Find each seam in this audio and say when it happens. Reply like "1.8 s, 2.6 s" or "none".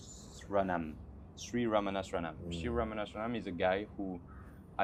none